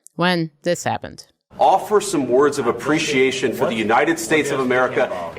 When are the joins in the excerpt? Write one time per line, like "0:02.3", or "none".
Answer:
0:01.4